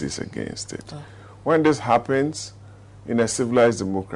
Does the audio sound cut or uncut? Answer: uncut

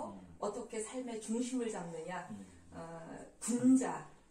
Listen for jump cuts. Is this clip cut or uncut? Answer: uncut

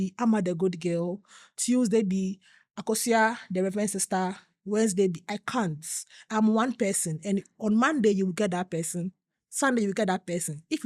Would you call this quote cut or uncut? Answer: uncut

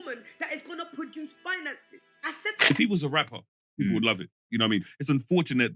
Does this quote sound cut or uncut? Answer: cut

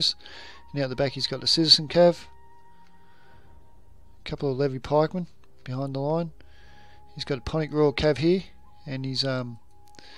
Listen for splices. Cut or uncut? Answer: uncut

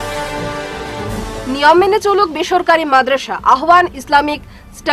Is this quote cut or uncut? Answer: cut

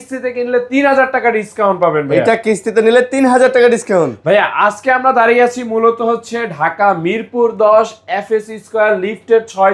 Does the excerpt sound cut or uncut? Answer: uncut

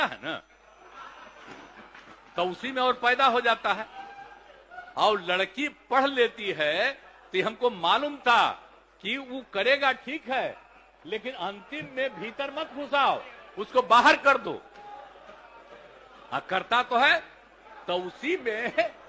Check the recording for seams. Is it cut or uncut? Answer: uncut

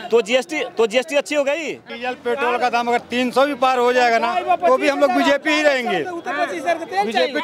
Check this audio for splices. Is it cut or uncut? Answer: cut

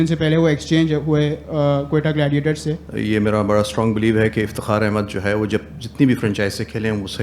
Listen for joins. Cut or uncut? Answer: cut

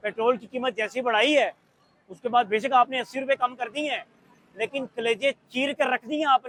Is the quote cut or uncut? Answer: uncut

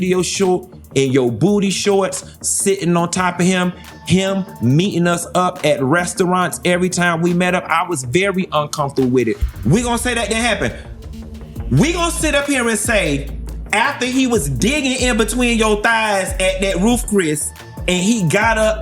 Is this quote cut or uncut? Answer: cut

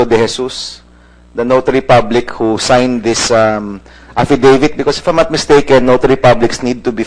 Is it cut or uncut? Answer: cut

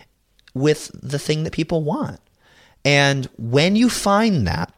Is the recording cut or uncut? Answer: cut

